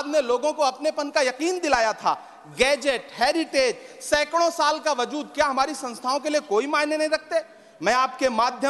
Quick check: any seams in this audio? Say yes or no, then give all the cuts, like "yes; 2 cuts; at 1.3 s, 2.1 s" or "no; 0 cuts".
no; 0 cuts